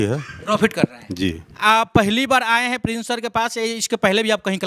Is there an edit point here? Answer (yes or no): no